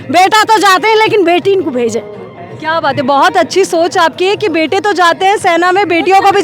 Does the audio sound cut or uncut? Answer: uncut